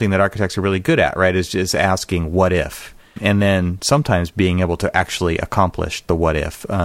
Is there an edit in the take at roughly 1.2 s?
no; 1 cut; at 3.2 s

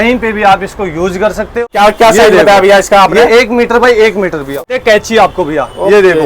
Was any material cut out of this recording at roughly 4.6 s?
yes; 2 cuts; at 1.5 s, 4.6 s

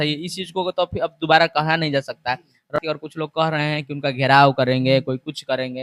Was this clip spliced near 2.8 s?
yes; 1 cut; at 2.8 s

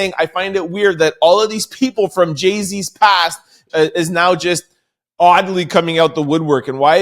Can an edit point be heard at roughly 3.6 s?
yes; 1 cut; at 3.6 s

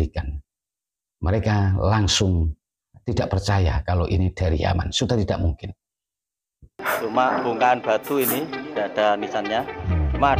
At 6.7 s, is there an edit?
yes; 1 cut; at 6.7 s

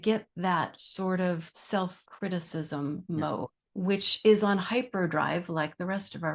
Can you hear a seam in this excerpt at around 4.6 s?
no; 2 cuts; at 1.8 s, 3.1 s

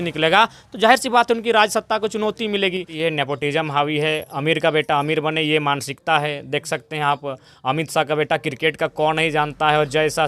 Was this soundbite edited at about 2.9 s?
yes; 1 cut; at 2.9 s

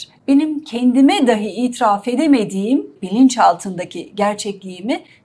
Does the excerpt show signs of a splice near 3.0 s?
yes; 1 cut; at 3.0 s

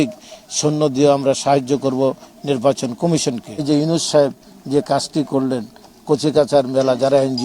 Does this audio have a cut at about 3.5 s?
yes; 1 cut; at 3.5 s

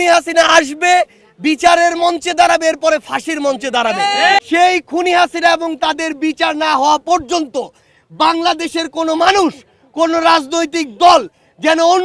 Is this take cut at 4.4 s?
yes; 1 cut; at 4.4 s

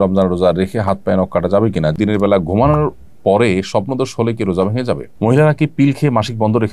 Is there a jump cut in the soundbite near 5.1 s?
yes; 2 cuts; at 1.9 s, 5.1 s

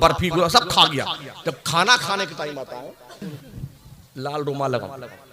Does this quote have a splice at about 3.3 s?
yes; 1 cut; at 3.3 s

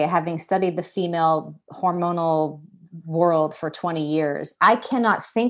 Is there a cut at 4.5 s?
yes; 1 cut; at 4.5 s

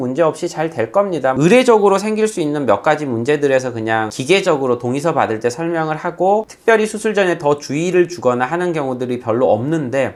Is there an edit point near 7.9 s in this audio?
no; 0 cuts

